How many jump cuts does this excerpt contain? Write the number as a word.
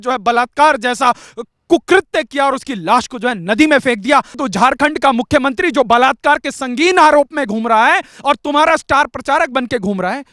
one